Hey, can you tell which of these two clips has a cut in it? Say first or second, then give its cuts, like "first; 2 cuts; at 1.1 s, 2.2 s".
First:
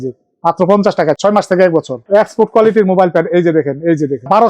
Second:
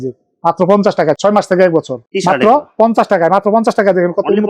first; 1 cut; at 2.0 s